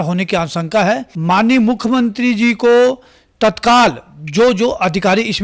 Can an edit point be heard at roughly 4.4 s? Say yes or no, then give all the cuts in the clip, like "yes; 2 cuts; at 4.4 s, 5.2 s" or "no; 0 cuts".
no; 1 cut; at 1.1 s